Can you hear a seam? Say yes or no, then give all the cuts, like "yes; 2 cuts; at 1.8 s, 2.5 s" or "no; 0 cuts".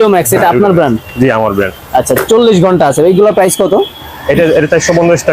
no; 0 cuts